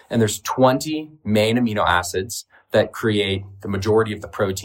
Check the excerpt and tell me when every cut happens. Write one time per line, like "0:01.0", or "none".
none